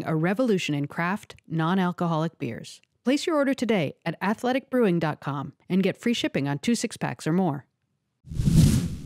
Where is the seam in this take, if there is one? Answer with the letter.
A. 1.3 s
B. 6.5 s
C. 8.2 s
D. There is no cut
C